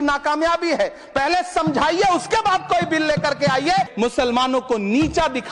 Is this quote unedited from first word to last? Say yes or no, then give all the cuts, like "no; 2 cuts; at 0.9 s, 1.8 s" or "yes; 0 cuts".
no; 1 cut; at 3.9 s